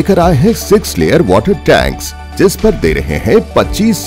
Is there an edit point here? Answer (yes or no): no